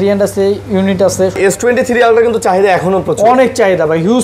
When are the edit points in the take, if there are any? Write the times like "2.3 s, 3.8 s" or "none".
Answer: 1.4 s